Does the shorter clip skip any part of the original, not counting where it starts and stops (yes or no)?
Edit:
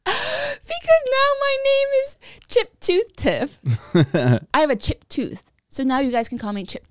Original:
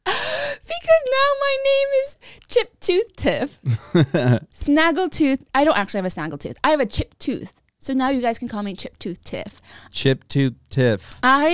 yes